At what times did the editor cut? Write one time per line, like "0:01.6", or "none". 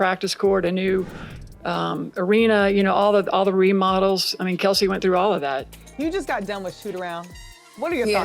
0:05.8